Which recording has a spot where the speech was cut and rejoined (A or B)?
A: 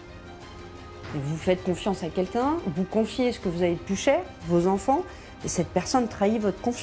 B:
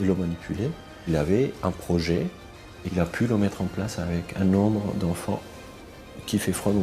B